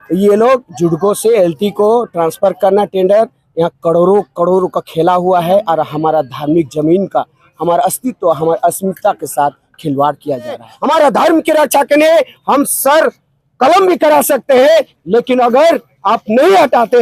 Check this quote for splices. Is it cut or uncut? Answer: cut